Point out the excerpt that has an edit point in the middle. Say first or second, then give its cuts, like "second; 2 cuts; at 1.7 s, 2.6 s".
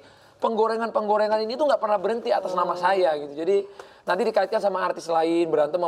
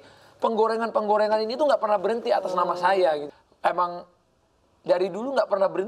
second; 1 cut; at 3.3 s